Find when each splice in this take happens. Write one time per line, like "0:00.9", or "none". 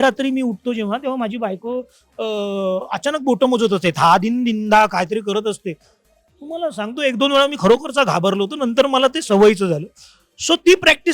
none